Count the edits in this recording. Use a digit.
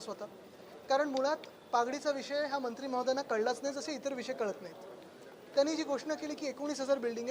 1